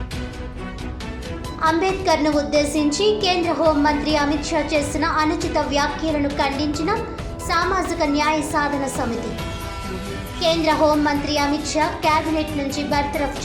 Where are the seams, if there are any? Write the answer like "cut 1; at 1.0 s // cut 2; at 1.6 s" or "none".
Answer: cut 1; at 1.6 s